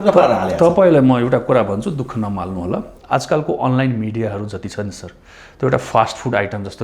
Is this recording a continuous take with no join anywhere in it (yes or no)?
yes